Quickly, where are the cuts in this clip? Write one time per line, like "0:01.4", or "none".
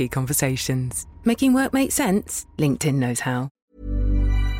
0:03.6